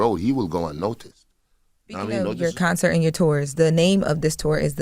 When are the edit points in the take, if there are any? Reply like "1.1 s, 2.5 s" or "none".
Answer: 2.3 s